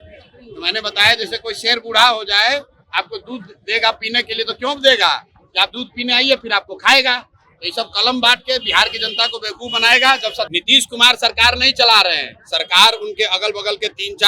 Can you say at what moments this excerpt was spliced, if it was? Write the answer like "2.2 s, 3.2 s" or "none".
10.5 s